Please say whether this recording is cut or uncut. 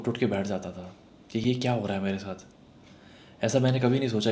uncut